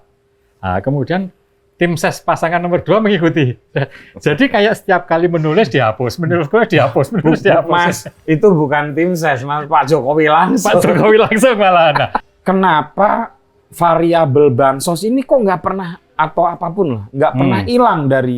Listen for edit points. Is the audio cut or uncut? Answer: cut